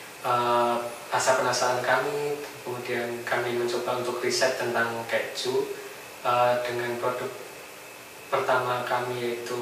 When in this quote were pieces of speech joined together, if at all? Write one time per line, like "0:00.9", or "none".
none